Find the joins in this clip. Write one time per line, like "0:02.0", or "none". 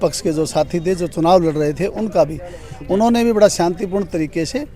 none